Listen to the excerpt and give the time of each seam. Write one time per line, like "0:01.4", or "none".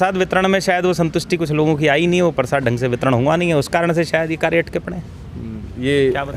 none